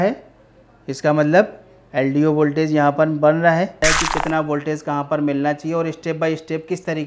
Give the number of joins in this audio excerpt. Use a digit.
2